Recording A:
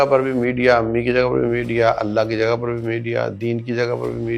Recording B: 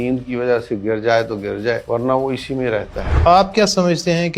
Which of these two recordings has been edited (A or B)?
B